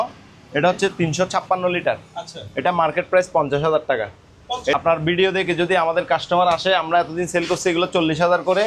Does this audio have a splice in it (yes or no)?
yes